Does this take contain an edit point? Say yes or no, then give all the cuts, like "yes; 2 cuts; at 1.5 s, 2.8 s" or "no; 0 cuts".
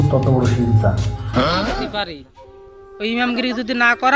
yes; 1 cut; at 1.8 s